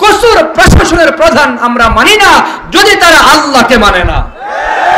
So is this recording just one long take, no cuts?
yes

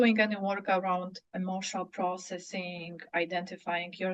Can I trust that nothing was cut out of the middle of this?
no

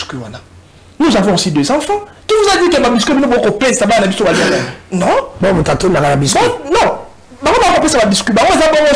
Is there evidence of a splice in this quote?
no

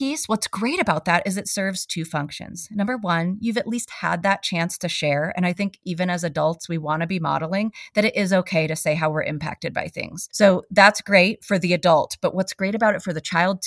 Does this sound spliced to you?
no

